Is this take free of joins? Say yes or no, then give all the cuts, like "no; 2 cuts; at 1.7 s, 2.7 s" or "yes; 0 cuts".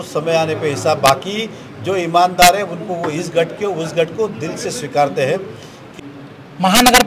no; 1 cut; at 5.8 s